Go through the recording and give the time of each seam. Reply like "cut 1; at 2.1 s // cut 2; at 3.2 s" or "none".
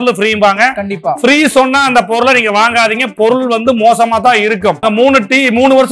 cut 1; at 4.8 s